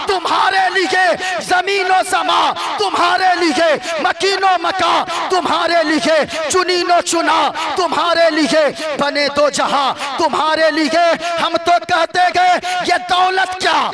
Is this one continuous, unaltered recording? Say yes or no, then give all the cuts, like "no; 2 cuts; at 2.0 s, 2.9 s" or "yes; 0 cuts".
yes; 0 cuts